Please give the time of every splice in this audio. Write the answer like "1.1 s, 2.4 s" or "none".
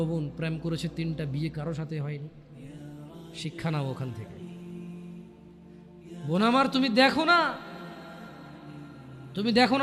none